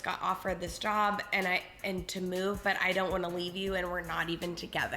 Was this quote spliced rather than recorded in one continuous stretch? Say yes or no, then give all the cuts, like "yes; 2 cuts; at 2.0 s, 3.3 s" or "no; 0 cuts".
no; 0 cuts